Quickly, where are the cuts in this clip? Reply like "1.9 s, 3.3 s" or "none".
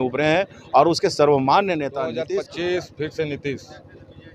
2.2 s